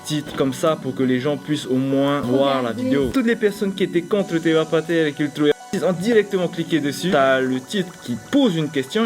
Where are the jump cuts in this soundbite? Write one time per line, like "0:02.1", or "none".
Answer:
0:02.2
0:03.1
0:07.1